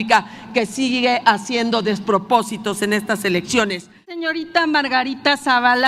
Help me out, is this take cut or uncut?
cut